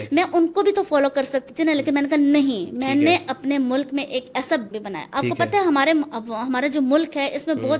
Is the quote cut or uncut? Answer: cut